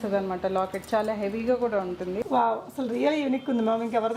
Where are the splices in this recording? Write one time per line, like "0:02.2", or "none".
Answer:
0:02.2